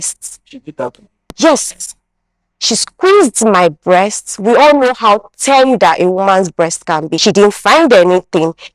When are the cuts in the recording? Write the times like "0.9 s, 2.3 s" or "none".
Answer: 7.1 s